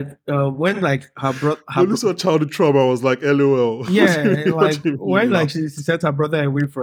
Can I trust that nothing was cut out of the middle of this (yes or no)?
yes